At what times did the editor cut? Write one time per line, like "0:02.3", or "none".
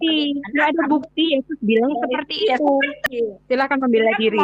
0:03.0